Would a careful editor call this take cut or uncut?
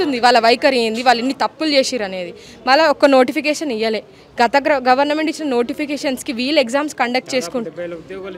uncut